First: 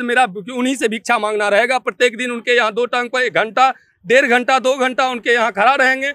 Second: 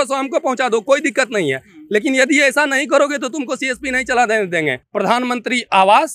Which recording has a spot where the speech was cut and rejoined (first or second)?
second